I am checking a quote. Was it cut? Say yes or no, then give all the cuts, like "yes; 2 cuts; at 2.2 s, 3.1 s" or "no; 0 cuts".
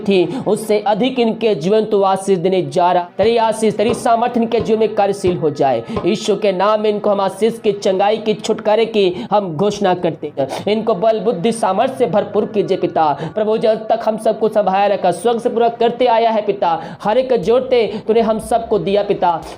yes; 2 cuts; at 3.0 s, 10.3 s